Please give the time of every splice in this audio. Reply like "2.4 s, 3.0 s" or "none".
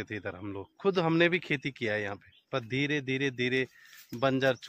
none

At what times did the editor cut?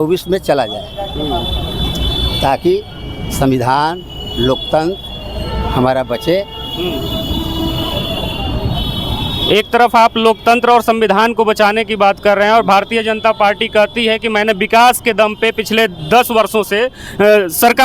none

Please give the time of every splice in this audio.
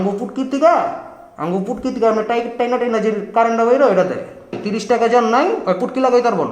4.6 s

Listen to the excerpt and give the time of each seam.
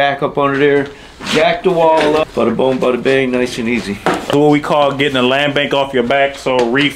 2.2 s, 4.3 s

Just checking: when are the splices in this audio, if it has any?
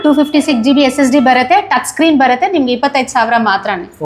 none

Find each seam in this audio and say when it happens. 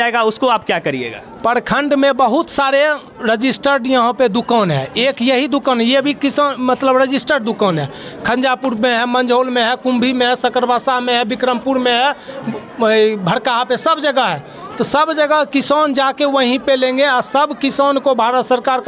none

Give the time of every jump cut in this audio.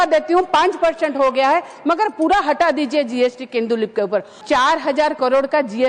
4.3 s

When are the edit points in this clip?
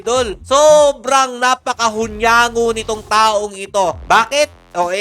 none

